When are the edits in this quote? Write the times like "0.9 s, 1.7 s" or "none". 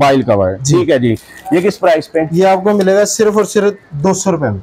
none

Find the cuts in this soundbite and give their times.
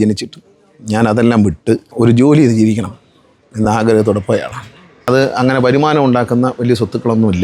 1.9 s, 4.9 s

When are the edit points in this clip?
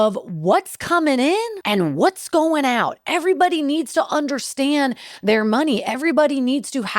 1.6 s

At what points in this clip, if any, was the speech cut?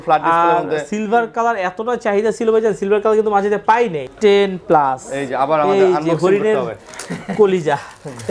4.0 s

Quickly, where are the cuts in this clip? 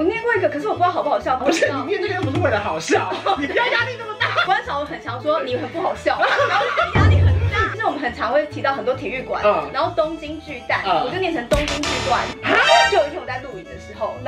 1.4 s, 4.4 s, 7.7 s, 12.9 s

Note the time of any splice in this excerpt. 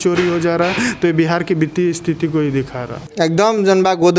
3.1 s

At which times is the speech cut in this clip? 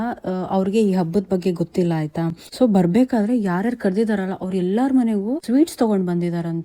none

